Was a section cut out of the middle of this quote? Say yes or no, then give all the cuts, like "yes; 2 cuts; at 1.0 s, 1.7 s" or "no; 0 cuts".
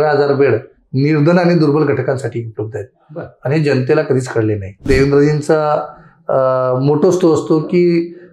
yes; 1 cut; at 4.8 s